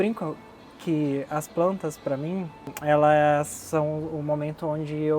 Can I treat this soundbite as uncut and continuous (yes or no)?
yes